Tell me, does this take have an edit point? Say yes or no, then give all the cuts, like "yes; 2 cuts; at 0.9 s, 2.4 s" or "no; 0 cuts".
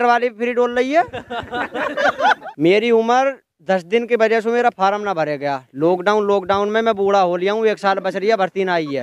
yes; 1 cut; at 2.4 s